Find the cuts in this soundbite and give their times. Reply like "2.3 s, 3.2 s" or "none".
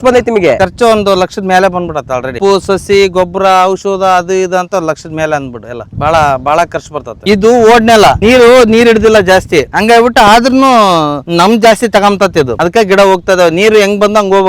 2.4 s, 7.2 s